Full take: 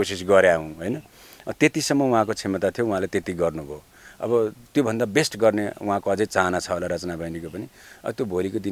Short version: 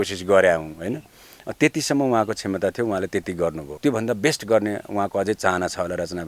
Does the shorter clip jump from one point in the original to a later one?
yes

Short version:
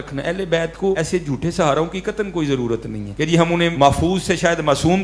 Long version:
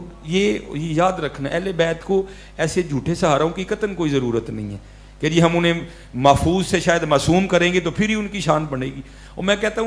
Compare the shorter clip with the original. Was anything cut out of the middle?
yes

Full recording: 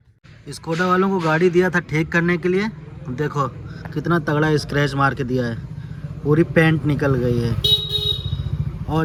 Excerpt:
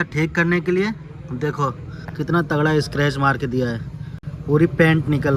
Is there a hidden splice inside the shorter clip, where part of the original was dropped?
no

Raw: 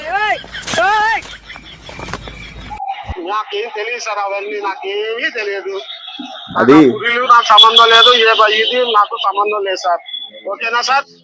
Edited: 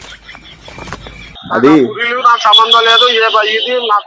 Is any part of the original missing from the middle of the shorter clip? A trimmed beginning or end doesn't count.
yes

